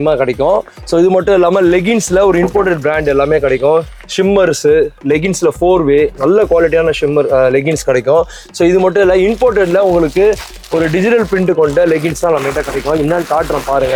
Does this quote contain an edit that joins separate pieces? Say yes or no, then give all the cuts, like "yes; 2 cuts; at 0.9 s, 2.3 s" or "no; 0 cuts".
no; 0 cuts